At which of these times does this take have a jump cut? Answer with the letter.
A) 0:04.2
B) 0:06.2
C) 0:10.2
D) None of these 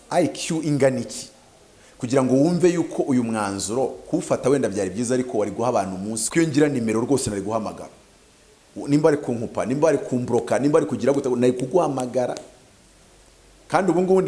B